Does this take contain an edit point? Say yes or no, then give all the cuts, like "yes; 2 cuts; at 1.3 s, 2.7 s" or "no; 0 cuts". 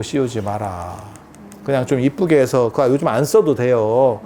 no; 0 cuts